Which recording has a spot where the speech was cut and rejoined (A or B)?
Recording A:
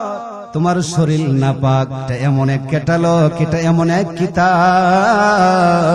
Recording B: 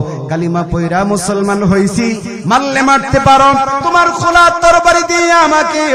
A